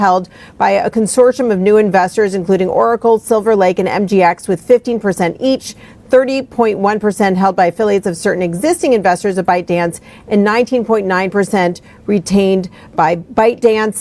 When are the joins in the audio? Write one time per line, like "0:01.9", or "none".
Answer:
0:02.7
0:04.2
0:12.8

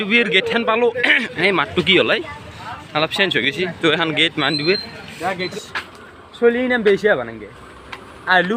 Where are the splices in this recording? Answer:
0:05.5

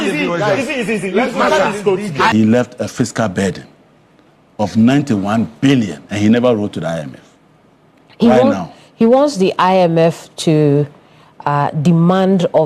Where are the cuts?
0:02.3

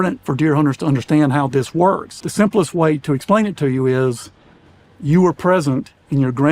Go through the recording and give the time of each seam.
0:02.2

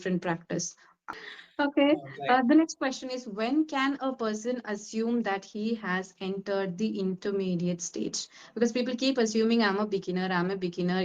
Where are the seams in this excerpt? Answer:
0:01.0

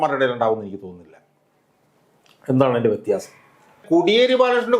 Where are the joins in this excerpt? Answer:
0:03.8

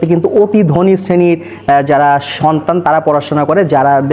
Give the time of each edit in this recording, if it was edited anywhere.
none

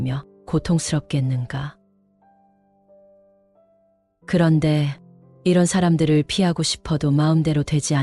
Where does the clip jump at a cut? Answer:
0:01.7
0:04.3

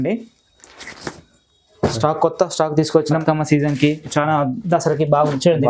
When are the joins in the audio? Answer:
0:03.2

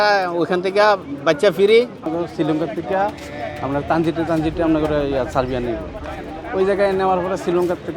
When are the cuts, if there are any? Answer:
0:02.1

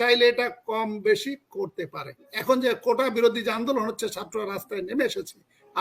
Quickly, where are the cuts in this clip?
0:02.3

